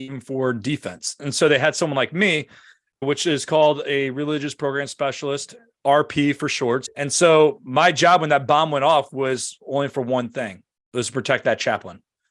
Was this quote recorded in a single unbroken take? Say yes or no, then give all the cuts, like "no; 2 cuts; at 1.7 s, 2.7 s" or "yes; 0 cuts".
no; 1 cut; at 6.9 s